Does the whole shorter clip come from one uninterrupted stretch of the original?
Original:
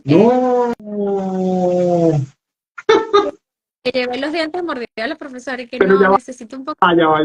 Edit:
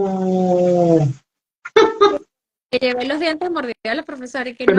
yes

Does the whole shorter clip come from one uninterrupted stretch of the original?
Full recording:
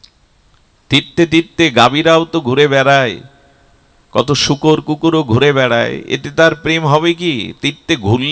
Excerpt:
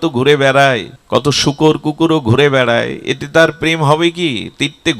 no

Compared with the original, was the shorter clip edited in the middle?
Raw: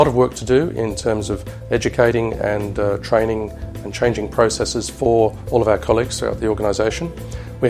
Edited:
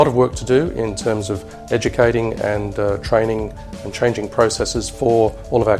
no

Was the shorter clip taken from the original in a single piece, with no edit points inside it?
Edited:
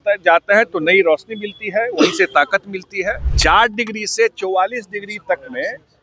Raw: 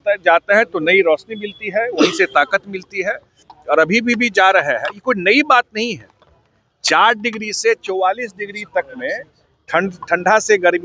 no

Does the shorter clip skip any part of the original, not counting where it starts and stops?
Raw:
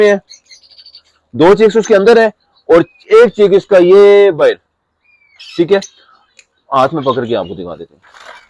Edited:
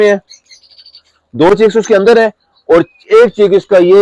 no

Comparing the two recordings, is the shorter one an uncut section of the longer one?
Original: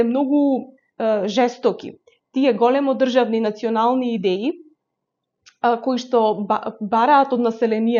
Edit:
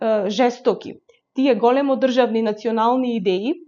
yes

